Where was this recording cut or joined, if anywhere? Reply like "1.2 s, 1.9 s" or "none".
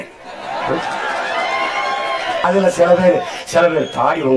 2.4 s